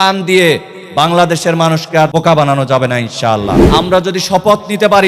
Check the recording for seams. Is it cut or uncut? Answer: cut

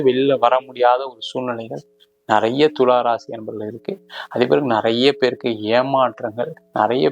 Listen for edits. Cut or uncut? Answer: uncut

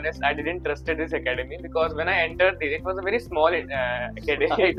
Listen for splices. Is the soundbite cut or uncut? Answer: uncut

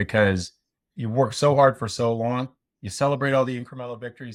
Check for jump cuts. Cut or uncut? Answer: uncut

